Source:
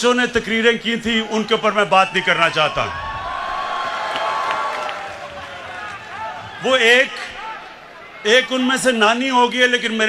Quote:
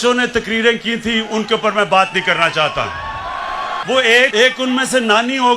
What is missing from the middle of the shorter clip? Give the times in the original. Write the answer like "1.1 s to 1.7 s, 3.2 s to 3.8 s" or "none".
3.8 s to 6.6 s, 7.1 s to 8.2 s